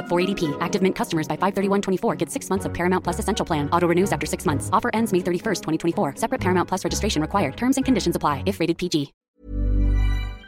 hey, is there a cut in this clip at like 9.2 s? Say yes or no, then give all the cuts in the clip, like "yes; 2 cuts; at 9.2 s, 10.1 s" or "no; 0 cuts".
yes; 1 cut; at 9.2 s